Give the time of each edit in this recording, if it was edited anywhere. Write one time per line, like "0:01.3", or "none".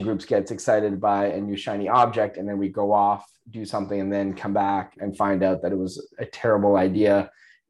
none